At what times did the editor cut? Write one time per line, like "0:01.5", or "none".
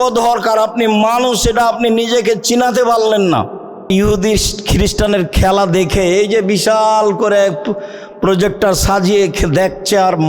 0:03.9